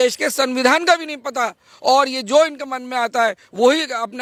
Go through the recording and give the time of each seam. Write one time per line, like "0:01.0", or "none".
none